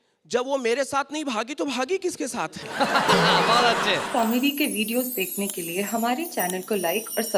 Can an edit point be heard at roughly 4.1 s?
yes; 1 cut; at 4.1 s

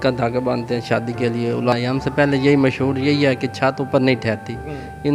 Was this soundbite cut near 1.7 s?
yes; 1 cut; at 1.7 s

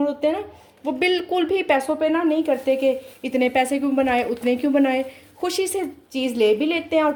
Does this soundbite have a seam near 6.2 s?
no; 0 cuts

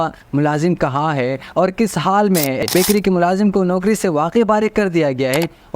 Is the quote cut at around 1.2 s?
no; 1 cut; at 2.6 s

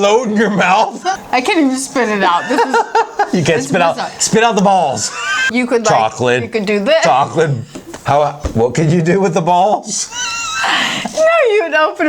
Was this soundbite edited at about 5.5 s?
yes; 2 cuts; at 1.2 s, 5.5 s

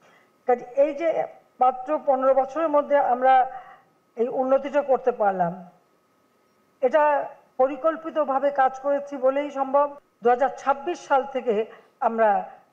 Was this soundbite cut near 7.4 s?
no; 1 cut; at 10.0 s

